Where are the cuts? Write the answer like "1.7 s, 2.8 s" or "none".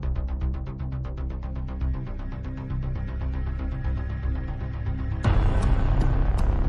none

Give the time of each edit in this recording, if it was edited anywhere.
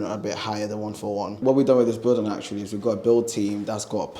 1.4 s

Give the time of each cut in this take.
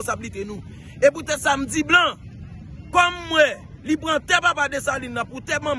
none

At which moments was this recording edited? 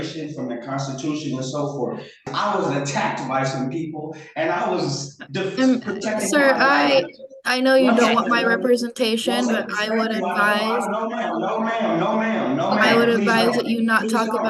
2.2 s

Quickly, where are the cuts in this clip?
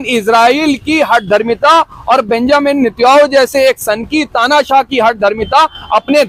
none

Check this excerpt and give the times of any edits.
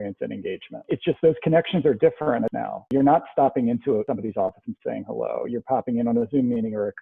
0.9 s, 2.9 s, 4.0 s

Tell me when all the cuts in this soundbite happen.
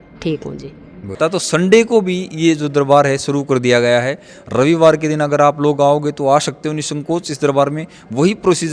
1.2 s

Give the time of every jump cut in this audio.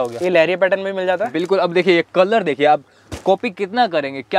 none

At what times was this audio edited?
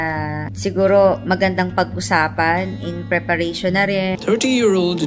4.2 s

